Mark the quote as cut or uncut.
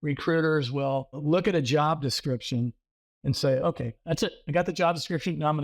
cut